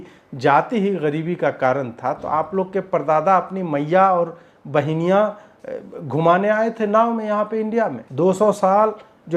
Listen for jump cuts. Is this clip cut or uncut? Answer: cut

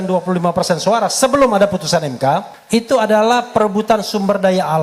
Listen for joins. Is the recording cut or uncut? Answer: cut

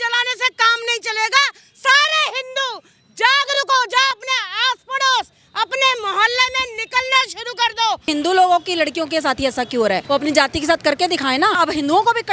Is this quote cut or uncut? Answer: cut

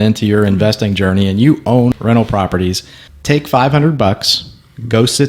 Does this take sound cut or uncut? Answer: cut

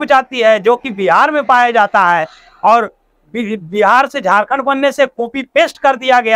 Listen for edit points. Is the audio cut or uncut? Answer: uncut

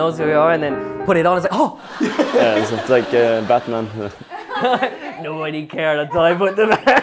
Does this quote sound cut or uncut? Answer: uncut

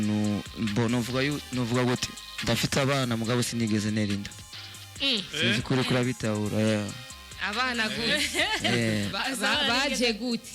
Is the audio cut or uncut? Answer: uncut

